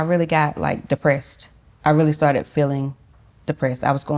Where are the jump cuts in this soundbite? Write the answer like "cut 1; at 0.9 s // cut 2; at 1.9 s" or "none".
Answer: none